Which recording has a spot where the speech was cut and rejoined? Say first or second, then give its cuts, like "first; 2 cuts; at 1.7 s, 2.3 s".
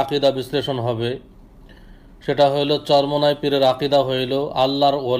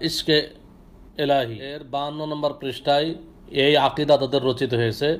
second; 1 cut; at 1.8 s